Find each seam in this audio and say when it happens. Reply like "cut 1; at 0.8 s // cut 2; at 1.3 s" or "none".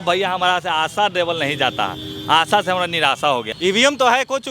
cut 1; at 3.5 s